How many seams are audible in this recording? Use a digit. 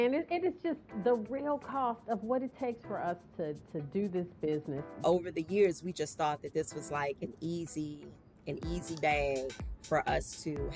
1